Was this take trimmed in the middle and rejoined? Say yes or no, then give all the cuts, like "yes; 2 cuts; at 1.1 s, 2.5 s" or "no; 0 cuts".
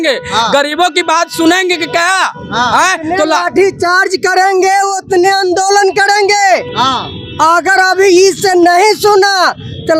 no; 0 cuts